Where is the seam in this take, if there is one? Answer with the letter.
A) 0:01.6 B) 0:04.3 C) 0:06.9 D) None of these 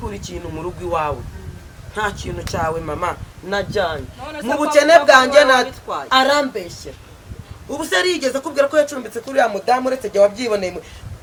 D